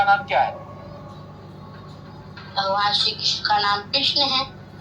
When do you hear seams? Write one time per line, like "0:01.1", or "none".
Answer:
none